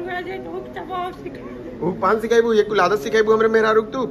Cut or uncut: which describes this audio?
uncut